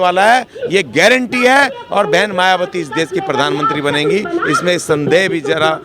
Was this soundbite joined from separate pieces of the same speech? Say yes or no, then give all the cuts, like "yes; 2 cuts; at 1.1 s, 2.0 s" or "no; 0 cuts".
no; 0 cuts